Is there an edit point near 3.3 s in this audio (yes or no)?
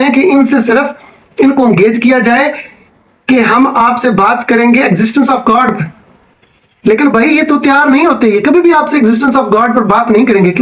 no